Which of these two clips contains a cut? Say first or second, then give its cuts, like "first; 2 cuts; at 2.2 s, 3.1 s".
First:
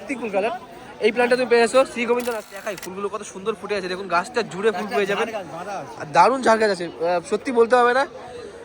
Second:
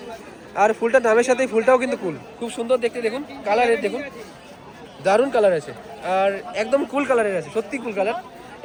first; 1 cut; at 2.4 s